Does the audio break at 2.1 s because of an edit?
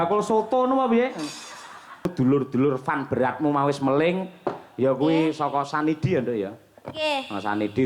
yes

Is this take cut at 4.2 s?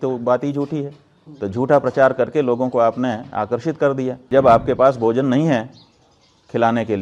yes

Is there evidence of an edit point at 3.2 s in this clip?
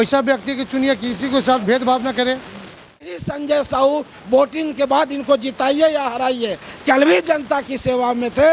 yes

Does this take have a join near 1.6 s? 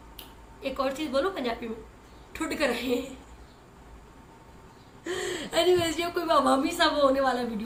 no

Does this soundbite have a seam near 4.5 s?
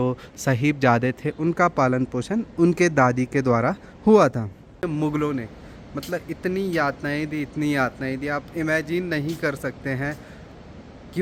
no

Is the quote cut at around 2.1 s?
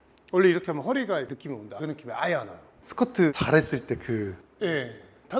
no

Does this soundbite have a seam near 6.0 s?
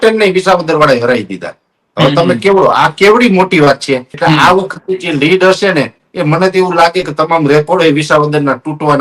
no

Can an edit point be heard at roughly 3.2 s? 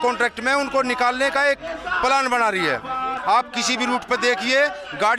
yes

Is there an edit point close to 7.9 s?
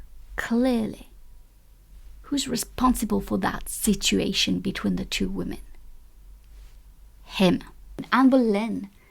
yes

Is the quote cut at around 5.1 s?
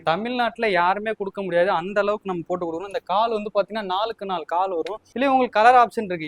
yes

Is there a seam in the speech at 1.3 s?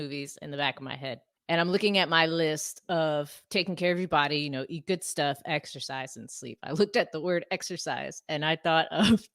yes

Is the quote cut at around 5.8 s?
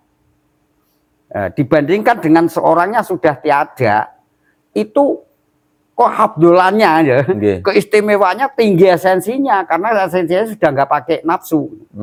no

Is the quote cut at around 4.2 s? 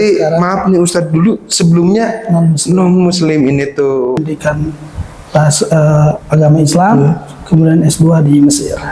yes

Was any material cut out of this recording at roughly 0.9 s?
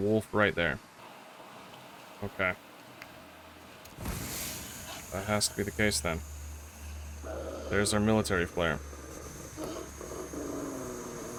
no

